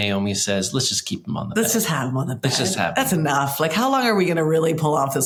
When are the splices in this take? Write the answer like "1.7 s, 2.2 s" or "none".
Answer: none